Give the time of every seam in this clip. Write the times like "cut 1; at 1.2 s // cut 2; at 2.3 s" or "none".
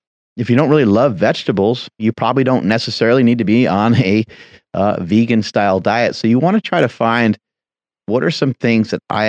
cut 1; at 2.0 s